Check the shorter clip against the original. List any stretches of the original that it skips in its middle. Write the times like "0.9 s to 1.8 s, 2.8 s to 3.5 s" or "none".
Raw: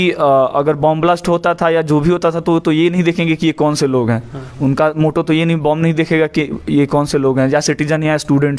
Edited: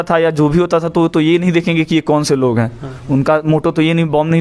none